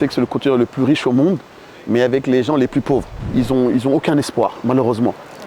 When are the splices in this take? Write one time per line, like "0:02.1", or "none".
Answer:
0:03.2